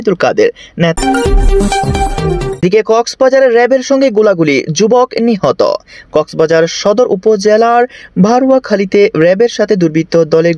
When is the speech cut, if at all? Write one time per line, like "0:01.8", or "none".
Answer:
0:00.9
0:02.6